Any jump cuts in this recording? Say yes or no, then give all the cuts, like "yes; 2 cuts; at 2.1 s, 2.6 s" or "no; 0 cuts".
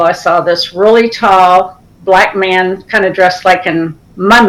no; 0 cuts